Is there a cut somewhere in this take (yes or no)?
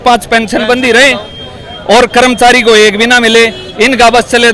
no